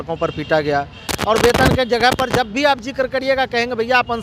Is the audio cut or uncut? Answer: cut